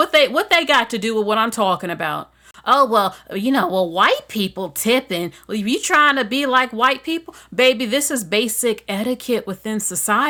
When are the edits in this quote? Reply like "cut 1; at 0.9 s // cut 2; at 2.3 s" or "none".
none

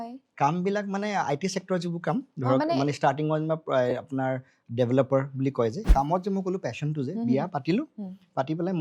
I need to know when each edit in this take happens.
cut 1; at 5.8 s

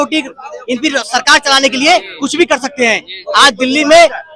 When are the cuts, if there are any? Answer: none

